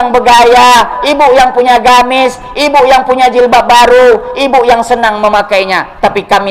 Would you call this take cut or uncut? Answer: uncut